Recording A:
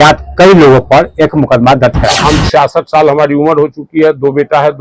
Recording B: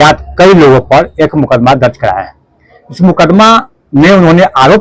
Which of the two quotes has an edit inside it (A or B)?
A